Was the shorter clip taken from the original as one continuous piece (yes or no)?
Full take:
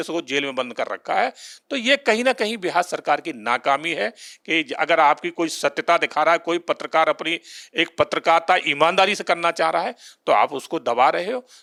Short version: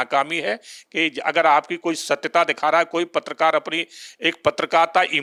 yes